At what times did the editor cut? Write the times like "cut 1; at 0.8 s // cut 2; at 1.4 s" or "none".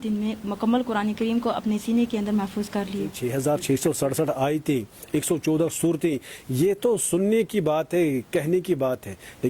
cut 1; at 3.2 s